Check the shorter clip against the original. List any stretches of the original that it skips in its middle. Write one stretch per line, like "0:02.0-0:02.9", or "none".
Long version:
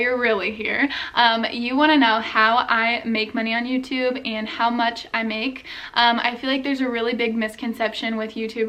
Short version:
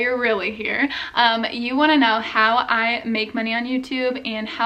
none